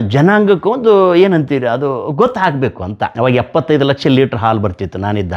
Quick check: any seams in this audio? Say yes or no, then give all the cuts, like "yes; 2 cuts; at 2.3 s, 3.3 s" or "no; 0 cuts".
yes; 1 cut; at 3.1 s